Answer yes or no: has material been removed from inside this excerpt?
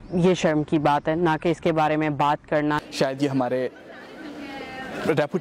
yes